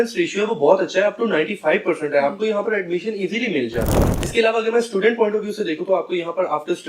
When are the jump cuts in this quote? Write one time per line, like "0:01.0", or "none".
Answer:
0:04.0